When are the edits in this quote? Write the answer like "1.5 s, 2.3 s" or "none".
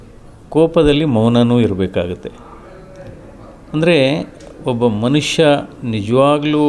none